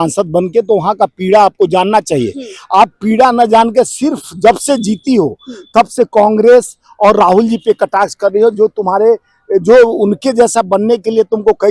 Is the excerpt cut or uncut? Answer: uncut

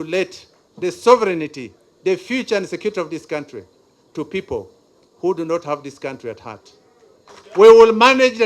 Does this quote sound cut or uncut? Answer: cut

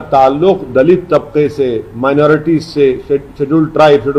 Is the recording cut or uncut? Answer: uncut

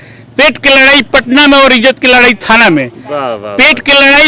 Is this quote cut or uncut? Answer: uncut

